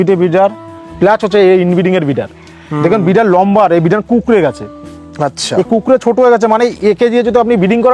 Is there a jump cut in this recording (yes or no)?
no